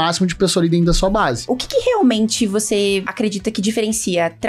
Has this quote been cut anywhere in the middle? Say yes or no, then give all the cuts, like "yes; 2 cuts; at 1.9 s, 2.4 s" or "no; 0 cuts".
yes; 2 cuts; at 1.4 s, 3.1 s